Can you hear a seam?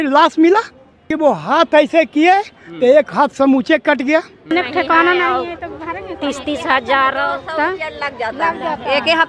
yes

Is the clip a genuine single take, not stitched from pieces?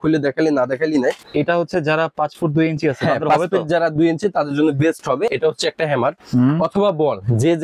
no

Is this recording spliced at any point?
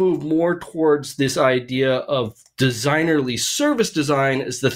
no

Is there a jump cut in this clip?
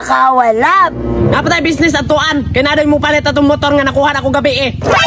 no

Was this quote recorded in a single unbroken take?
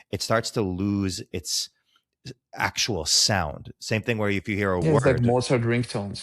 no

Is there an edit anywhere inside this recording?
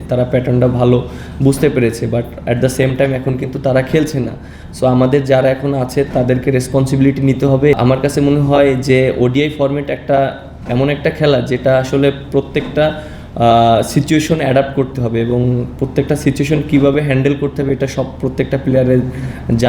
yes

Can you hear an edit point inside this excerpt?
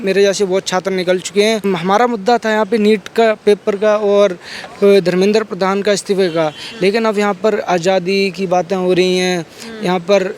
yes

